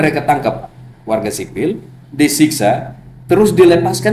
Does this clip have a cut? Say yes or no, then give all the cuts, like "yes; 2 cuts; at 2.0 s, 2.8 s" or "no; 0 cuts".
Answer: no; 0 cuts